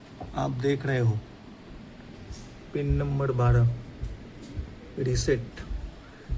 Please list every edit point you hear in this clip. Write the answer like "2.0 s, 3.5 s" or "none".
none